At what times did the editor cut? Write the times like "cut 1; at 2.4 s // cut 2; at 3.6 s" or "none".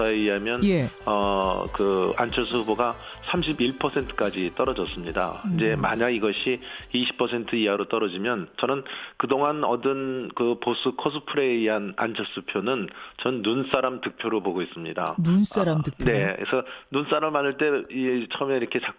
cut 1; at 6.3 s

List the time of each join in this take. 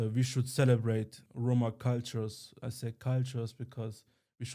cut 1; at 1.2 s

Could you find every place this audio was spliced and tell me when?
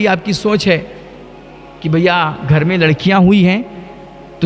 none

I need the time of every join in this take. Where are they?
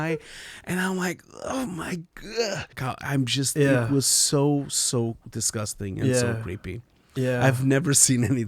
cut 1; at 2.8 s

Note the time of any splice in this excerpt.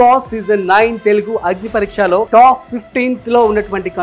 cut 1; at 2.3 s

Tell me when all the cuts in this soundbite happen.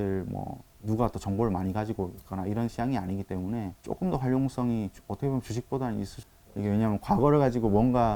cut 1; at 3.8 s // cut 2; at 6.2 s

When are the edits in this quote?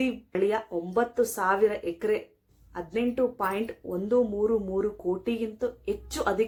none

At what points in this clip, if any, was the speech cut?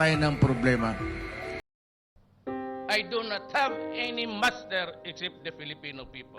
cut 1; at 1.7 s

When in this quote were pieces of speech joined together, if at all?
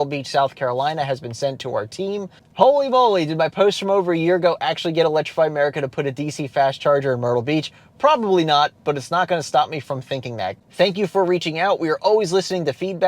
cut 1; at 2.4 s // cut 2; at 10.6 s

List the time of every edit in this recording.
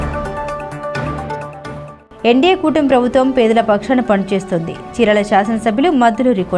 none

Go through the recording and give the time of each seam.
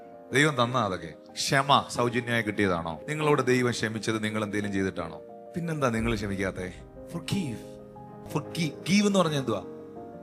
cut 1; at 3.0 s // cut 2; at 8.1 s

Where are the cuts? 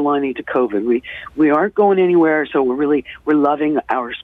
none

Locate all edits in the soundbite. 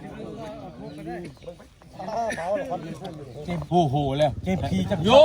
cut 1; at 3.3 s

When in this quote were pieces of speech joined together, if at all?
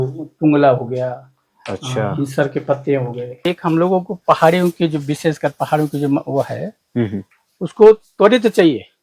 cut 1; at 3.4 s

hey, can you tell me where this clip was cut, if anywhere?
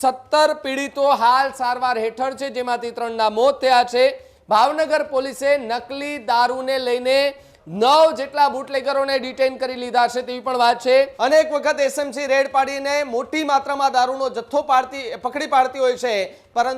cut 1; at 11.1 s

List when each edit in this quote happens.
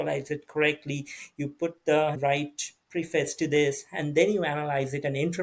cut 1; at 2.2 s

